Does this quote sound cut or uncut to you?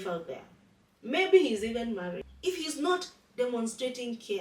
cut